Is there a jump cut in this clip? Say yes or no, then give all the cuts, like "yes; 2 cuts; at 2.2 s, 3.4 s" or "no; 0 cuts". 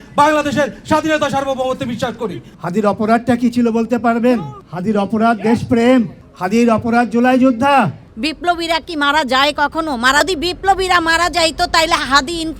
yes; 2 cuts; at 2.5 s, 8.0 s